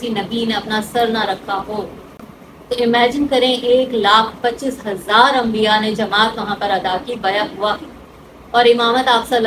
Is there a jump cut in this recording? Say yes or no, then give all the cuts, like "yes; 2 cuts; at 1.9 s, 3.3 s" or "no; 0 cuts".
no; 0 cuts